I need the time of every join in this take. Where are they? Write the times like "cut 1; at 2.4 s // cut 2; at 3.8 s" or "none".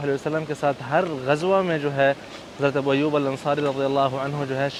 none